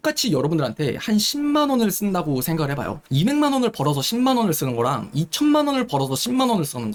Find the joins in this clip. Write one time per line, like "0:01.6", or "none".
none